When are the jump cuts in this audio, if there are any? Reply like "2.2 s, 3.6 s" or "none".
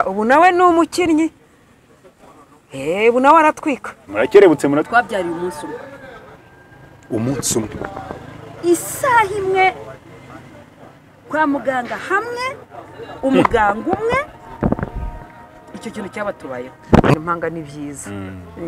4.9 s, 17.1 s